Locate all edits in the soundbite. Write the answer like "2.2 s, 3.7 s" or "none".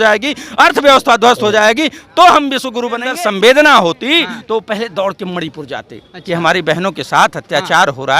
3.1 s